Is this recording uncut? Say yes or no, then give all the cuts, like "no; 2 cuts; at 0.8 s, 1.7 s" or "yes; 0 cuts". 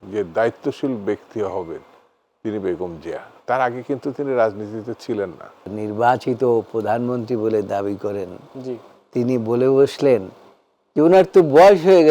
no; 1 cut; at 5.7 s